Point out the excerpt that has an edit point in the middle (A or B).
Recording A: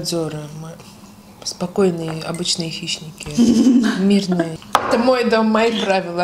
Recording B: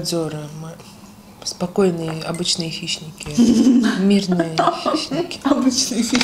A